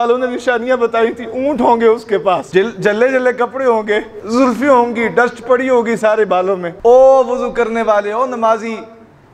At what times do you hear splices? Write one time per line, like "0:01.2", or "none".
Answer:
0:02.5
0:04.2
0:06.7